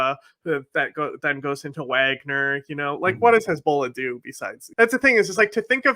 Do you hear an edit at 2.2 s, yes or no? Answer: no